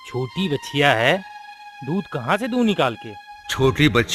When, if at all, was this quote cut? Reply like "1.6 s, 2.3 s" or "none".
none